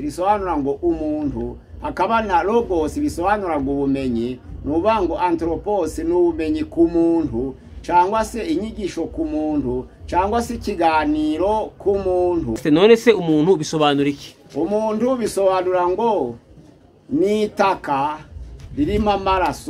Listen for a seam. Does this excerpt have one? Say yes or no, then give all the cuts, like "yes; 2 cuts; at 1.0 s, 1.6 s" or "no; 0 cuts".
yes; 1 cut; at 12.6 s